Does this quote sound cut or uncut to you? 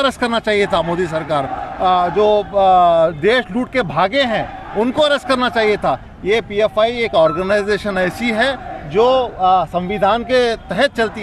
uncut